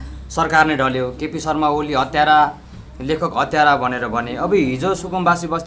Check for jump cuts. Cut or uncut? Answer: uncut